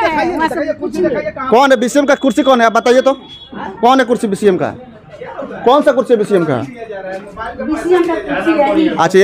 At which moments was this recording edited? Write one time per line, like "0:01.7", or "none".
none